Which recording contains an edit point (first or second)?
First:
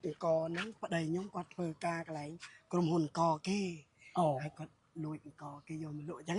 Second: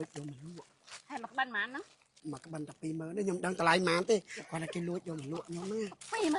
second